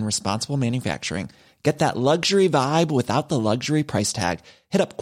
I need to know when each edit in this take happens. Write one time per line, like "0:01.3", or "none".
none